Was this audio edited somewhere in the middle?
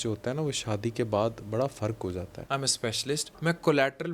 yes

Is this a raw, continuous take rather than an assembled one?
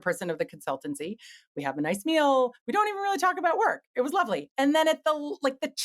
yes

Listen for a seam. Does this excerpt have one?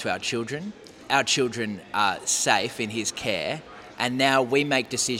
yes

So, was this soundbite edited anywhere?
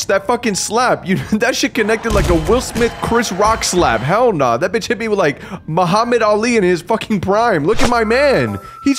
no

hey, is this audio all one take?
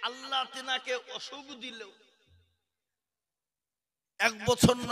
yes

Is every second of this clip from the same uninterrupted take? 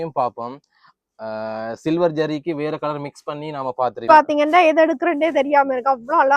no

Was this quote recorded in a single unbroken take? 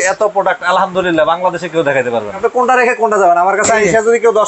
no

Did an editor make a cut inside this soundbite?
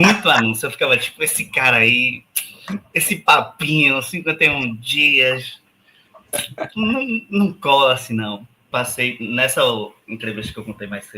yes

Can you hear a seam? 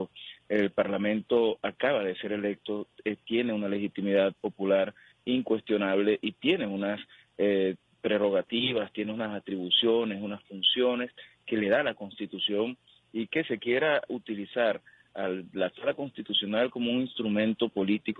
yes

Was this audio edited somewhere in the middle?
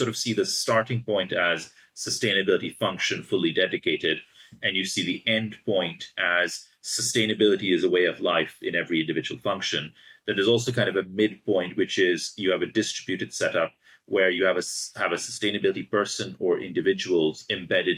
no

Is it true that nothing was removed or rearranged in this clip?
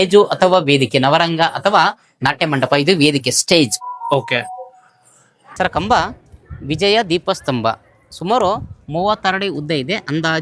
no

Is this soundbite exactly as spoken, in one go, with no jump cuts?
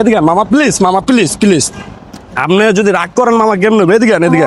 yes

